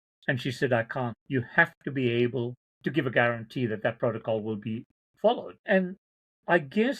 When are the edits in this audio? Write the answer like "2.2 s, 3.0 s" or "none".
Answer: 1.2 s, 2.6 s, 5.6 s